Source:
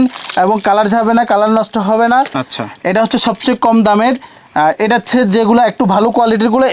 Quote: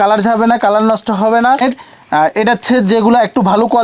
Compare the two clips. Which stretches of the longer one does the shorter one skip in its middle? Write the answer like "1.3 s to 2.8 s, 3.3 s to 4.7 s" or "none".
2.3 s to 4.0 s